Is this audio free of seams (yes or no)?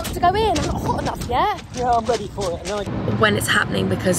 no